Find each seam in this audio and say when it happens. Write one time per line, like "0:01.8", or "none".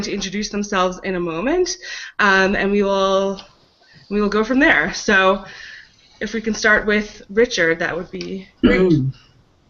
0:04.2